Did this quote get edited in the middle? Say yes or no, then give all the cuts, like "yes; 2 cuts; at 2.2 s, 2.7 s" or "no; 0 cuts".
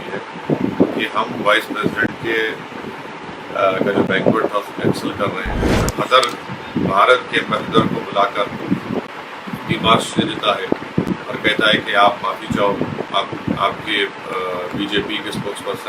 yes; 1 cut; at 5.6 s